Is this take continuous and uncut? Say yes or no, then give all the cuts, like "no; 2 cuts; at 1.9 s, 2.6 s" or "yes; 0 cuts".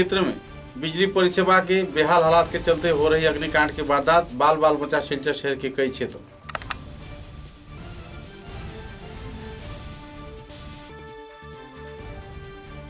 yes; 0 cuts